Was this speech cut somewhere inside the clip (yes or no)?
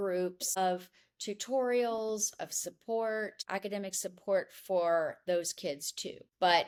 no